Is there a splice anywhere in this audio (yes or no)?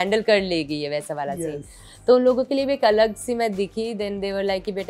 no